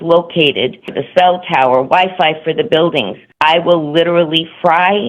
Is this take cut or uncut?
cut